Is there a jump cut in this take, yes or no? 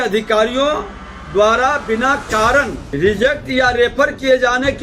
yes